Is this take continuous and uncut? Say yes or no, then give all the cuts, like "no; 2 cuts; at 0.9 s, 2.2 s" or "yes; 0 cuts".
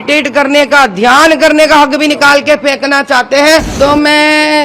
no; 1 cut; at 3.7 s